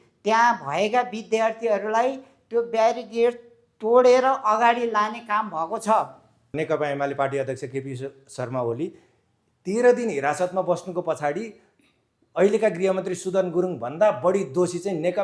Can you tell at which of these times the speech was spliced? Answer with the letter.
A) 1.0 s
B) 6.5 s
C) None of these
B